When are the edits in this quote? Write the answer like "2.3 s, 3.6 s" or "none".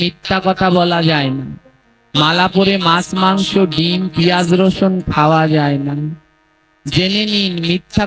none